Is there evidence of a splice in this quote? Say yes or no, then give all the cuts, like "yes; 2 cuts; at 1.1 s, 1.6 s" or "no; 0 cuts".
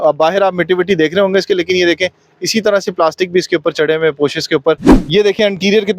yes; 1 cut; at 4.9 s